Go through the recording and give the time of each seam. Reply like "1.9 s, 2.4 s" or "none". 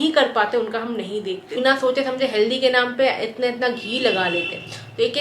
1.6 s

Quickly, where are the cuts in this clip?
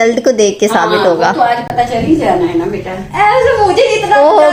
none

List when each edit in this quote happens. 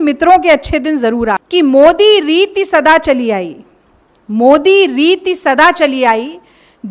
1.4 s

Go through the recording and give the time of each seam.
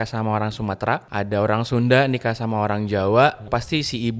1.1 s, 3.5 s

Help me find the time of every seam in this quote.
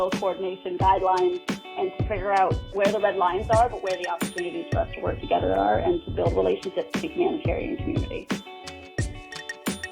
8.1 s

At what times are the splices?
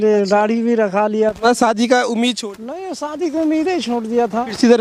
none

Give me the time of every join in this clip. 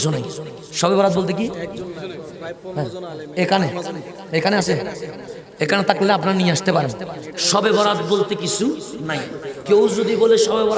none

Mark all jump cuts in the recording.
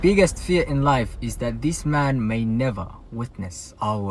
none

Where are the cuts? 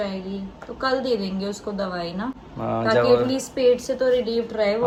none

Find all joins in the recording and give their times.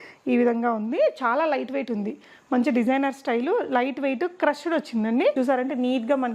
5.3 s

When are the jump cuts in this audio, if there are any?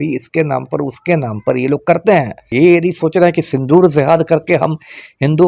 2.5 s

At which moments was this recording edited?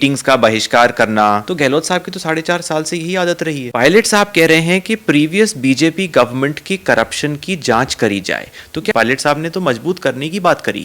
1.5 s, 3.7 s, 8.9 s

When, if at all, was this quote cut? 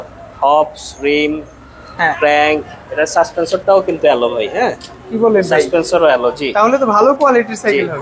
none

